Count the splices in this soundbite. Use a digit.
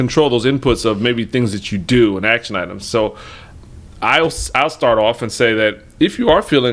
0